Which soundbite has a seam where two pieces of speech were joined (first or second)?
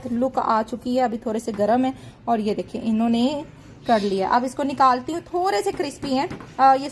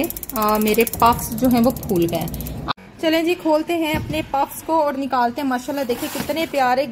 second